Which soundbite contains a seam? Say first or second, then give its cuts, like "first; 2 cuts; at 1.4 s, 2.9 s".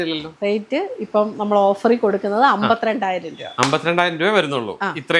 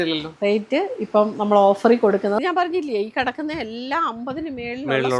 second; 1 cut; at 2.4 s